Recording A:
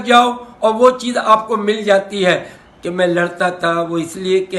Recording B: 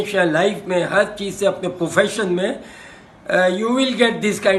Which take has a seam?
A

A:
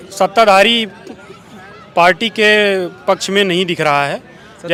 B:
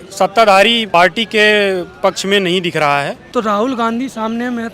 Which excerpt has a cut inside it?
B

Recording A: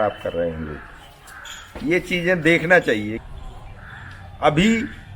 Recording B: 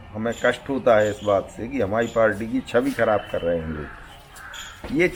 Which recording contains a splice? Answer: A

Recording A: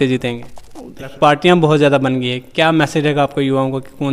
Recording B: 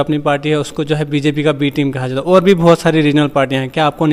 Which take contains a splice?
A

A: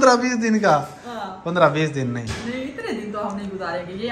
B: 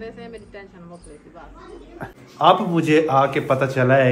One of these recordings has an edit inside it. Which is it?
B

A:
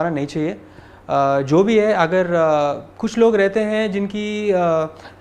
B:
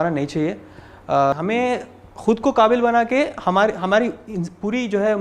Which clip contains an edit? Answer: B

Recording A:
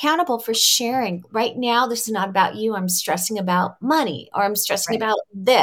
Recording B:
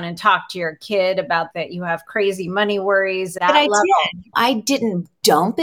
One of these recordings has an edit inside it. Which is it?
B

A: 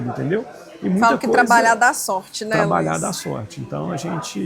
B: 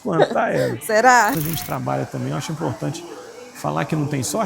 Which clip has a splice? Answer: B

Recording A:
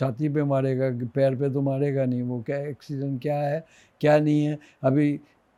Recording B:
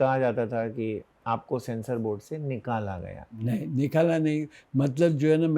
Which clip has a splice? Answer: B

